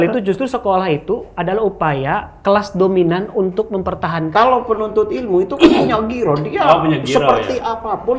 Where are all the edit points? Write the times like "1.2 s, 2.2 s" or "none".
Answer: 4.3 s